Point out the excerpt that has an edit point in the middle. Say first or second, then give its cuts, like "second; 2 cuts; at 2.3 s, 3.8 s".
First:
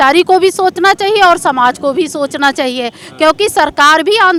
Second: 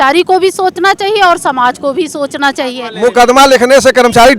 second; 1 cut; at 2.8 s